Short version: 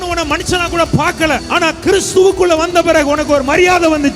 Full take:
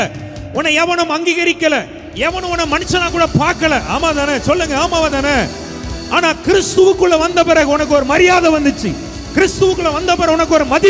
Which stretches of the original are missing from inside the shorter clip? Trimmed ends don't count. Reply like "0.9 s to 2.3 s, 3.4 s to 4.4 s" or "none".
3.8 s to 6.0 s

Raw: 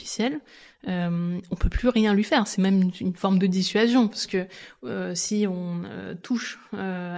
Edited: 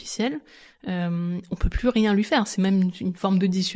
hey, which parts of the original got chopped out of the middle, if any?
none

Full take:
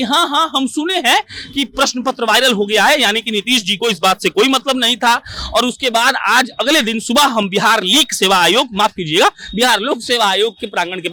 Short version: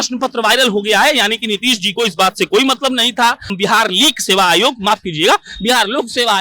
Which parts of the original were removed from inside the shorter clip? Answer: 5.4 s to 7.5 s

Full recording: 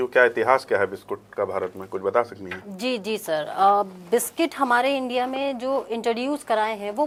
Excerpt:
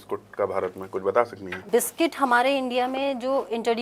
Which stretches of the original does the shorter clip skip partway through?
2.6 s to 4.0 s

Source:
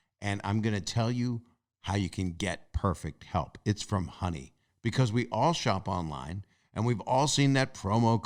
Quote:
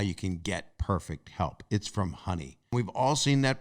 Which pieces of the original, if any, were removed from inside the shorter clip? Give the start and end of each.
4.6 s to 6.7 s

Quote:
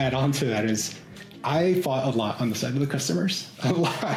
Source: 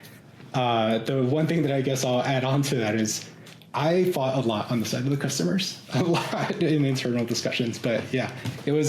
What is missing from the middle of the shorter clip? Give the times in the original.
none

